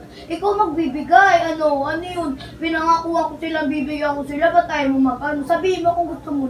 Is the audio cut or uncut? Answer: cut